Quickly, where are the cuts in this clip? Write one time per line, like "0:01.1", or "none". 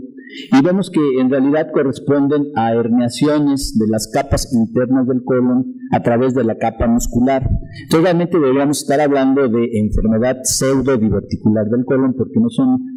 none